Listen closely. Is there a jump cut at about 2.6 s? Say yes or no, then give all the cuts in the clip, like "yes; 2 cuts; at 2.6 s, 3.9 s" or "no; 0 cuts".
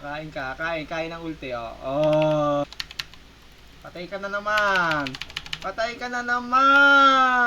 yes; 1 cut; at 2.6 s